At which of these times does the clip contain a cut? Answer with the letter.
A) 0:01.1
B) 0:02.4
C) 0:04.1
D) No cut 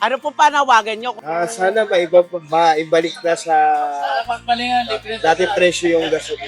A